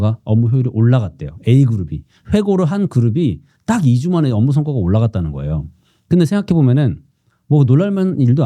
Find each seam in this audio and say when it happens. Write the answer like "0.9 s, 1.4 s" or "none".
none